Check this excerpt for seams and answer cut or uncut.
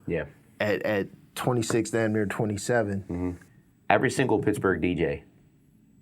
cut